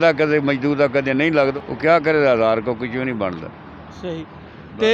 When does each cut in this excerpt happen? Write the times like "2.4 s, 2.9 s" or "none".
none